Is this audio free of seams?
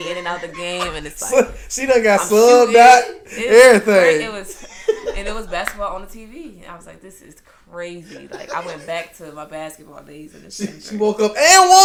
yes; 0 cuts

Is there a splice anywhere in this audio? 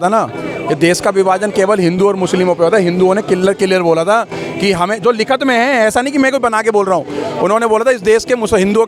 no; 0 cuts

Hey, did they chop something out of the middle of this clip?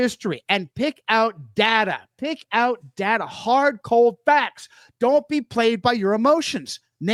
no; 0 cuts

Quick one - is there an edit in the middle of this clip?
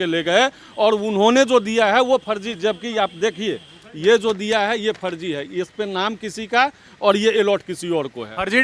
no; 0 cuts

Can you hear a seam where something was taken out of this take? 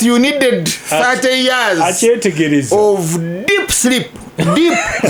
no; 0 cuts

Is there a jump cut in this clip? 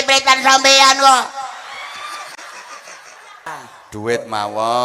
yes; 1 cut; at 3.5 s

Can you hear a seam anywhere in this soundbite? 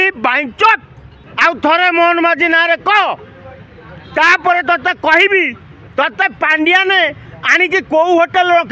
yes; 1 cut; at 1.2 s

